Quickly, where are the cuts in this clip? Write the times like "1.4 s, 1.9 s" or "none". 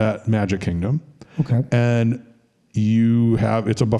none